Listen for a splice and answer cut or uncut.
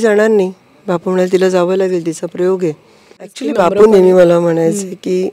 cut